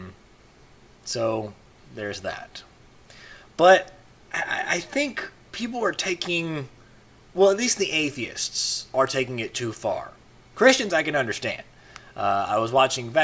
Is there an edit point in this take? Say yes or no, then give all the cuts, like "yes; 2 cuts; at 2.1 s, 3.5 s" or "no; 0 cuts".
no; 0 cuts